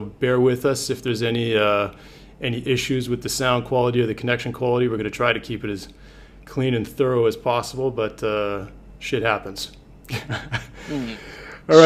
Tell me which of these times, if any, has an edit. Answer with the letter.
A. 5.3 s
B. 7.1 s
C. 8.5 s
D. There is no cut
C